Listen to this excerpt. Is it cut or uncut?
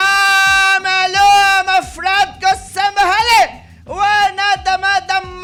uncut